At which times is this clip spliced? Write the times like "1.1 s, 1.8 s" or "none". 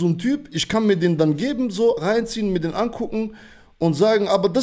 none